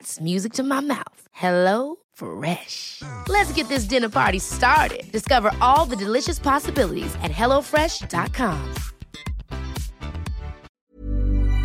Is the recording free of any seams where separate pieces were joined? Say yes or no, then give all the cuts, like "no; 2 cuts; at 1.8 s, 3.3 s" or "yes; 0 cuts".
no; 1 cut; at 10.7 s